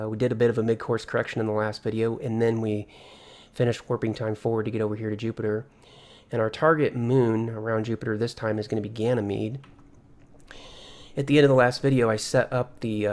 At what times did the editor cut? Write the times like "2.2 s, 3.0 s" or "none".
none